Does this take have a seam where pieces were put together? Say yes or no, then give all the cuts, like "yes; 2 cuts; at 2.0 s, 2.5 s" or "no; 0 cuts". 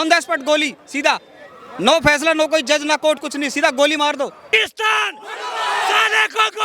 yes; 1 cut; at 4.5 s